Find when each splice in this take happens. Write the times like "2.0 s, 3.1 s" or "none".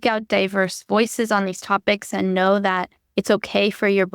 none